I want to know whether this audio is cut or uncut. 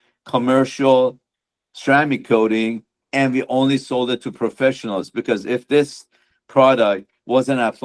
uncut